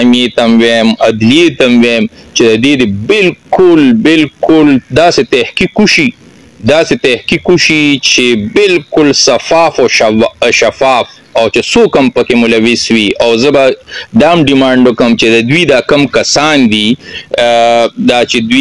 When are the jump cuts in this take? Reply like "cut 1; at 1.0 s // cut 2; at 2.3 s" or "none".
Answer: none